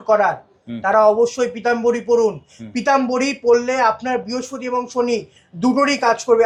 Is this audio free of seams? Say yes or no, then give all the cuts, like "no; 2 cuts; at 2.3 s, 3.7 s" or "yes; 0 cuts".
yes; 0 cuts